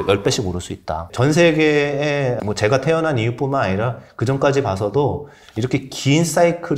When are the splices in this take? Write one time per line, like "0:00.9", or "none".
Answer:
0:01.1
0:02.4